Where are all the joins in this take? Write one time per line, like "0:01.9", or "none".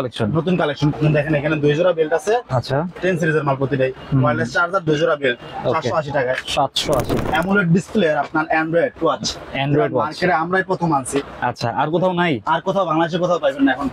0:00.9
0:02.9
0:07.2